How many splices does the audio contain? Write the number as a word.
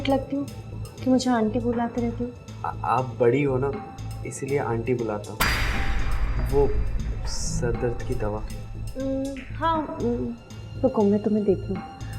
zero